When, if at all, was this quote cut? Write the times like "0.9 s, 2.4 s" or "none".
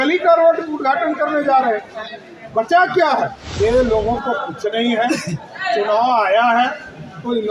3.4 s